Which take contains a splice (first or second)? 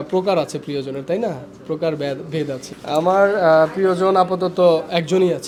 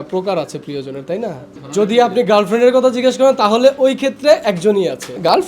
second